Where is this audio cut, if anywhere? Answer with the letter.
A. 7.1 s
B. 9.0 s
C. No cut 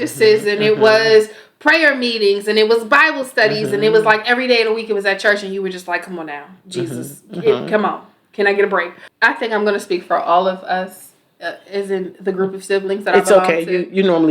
B